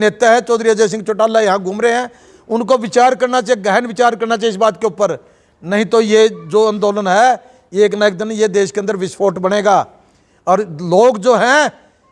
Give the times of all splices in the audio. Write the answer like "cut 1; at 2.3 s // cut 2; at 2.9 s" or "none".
none